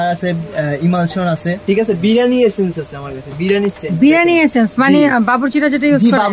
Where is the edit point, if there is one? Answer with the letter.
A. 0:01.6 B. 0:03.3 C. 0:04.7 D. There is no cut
A